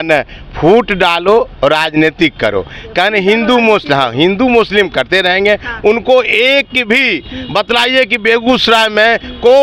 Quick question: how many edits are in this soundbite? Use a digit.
0